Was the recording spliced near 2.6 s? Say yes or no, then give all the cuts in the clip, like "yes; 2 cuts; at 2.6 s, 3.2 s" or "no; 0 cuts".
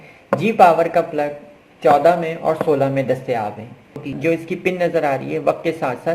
no; 1 cut; at 4.1 s